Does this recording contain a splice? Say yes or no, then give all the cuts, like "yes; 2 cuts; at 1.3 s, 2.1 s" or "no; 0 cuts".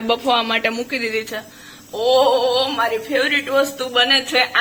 no; 0 cuts